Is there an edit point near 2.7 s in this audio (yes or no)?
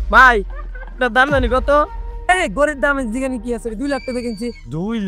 no